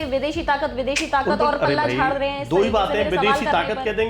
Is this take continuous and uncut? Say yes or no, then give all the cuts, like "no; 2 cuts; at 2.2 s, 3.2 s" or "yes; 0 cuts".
yes; 0 cuts